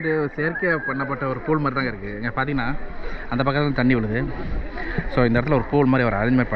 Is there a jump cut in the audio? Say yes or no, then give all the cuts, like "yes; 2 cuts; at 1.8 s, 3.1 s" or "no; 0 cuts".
no; 0 cuts